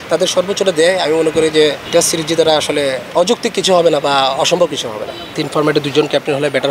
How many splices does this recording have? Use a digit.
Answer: 3